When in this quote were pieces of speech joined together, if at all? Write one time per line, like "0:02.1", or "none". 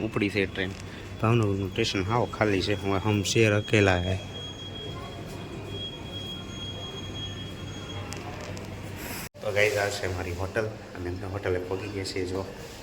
0:09.3

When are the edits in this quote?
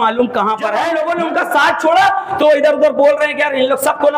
0:01.0

